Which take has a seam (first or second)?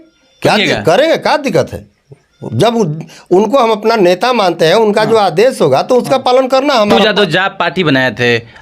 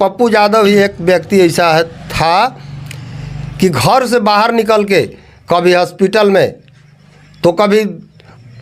first